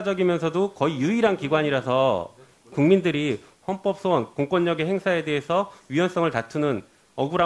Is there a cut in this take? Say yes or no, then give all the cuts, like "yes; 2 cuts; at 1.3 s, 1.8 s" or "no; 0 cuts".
yes; 1 cut; at 2.7 s